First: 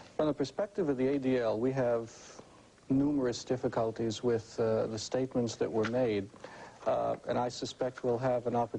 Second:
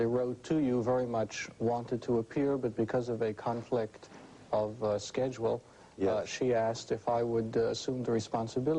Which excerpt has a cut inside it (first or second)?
second